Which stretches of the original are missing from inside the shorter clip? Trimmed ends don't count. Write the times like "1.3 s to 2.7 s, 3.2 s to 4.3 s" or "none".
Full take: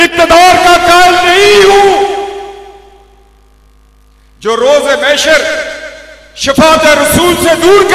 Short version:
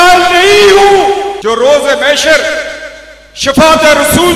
2.3 s to 4.4 s